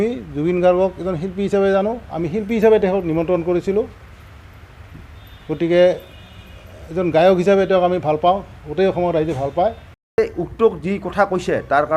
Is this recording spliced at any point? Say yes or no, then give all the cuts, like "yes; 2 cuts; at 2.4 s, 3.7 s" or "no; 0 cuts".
yes; 1 cut; at 10.2 s